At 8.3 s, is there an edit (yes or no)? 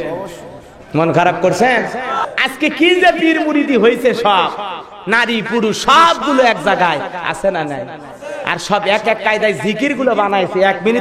no